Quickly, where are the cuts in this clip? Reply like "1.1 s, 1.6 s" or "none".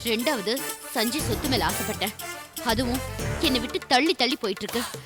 none

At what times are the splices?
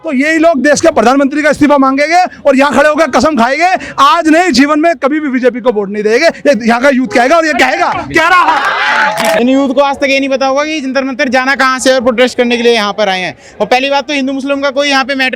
9.4 s

